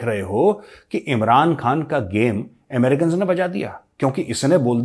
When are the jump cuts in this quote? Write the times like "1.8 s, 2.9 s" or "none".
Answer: none